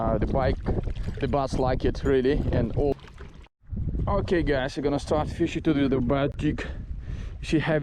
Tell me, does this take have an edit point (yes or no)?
yes